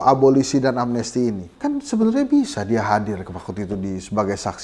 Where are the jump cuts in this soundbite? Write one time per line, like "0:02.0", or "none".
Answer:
0:01.5